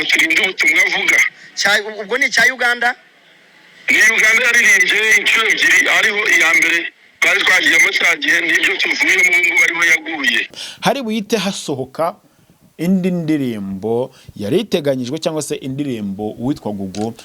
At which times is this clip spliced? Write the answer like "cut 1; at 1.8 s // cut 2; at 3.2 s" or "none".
cut 1; at 10.6 s